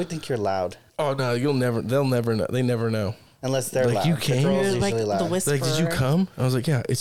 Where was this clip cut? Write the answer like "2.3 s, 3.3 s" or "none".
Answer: 0.8 s, 3.3 s